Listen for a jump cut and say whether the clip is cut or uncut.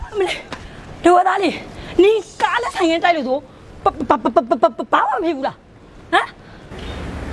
uncut